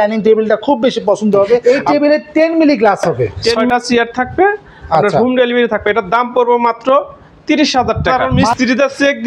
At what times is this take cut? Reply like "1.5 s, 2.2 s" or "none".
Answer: 1.6 s, 3.7 s, 8.3 s